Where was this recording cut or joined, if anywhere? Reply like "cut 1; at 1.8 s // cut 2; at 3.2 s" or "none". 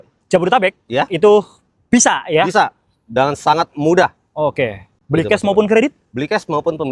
none